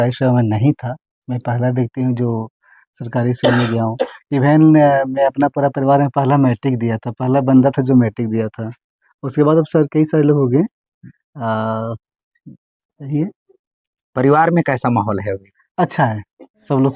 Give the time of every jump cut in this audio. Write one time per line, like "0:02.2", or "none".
none